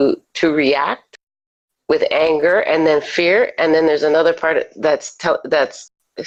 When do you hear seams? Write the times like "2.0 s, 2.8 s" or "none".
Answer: none